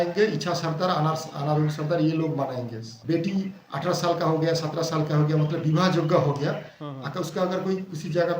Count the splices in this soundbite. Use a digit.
1